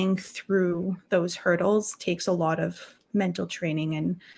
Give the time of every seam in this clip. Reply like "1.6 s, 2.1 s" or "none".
none